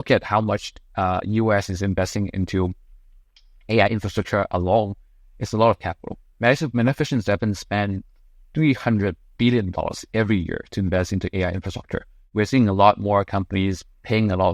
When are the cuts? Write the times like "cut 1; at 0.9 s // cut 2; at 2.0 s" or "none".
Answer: cut 1; at 12.2 s